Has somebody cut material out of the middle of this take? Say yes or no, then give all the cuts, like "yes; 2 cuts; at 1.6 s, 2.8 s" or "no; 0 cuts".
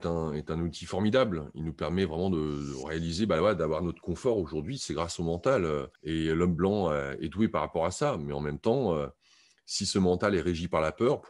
yes; 1 cut; at 5.9 s